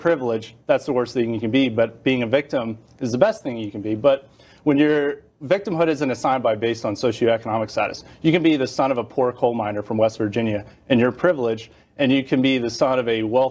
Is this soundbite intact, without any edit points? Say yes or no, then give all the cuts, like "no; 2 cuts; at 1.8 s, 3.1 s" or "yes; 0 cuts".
yes; 0 cuts